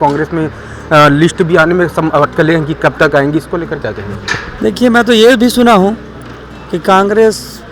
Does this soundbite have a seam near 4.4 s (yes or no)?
yes